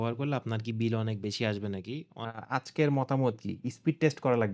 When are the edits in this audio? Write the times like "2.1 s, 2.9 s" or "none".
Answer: 2.1 s